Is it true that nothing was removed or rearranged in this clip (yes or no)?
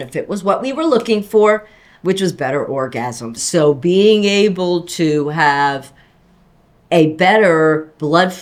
yes